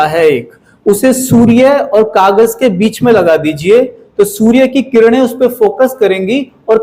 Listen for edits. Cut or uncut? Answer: uncut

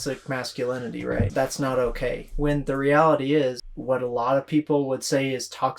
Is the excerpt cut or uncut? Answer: cut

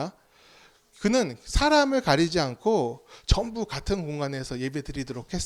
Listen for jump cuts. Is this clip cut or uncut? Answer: uncut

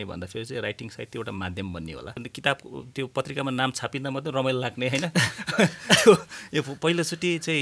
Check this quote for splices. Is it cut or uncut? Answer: cut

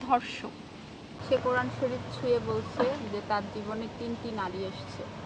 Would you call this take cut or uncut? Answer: cut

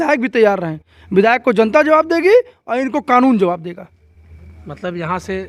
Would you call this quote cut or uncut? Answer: uncut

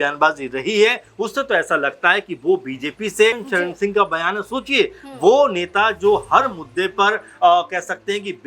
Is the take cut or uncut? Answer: cut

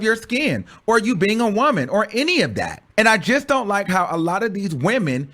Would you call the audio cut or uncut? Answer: cut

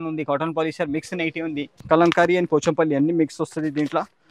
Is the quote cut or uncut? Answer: cut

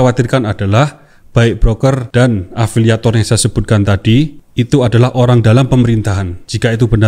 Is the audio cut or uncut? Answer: uncut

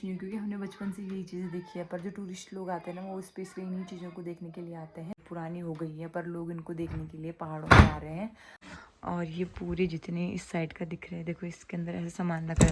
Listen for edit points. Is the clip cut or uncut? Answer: cut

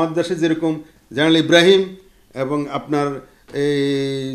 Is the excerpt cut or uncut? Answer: uncut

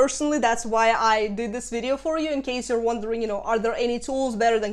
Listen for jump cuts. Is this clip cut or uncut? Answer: uncut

